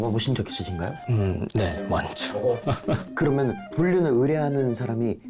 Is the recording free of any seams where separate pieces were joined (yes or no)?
no